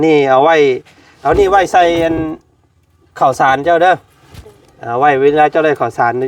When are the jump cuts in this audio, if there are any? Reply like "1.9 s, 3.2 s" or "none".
none